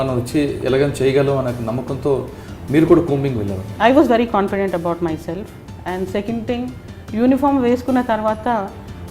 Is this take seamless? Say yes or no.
no